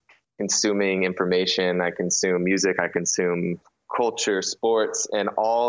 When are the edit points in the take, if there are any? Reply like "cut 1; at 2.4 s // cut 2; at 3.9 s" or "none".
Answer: none